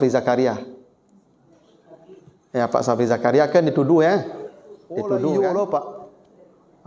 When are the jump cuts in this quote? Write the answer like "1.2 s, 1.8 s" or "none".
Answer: 5.1 s